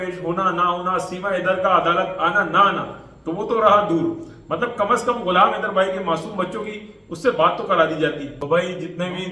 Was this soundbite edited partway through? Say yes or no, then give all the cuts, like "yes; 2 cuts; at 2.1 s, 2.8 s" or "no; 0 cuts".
yes; 1 cut; at 8.3 s